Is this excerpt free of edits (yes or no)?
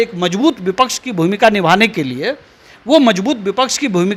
yes